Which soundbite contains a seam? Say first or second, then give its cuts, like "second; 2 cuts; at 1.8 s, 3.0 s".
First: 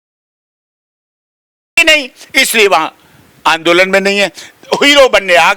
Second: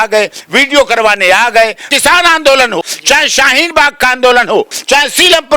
second; 3 cuts; at 1.8 s, 2.8 s, 4.7 s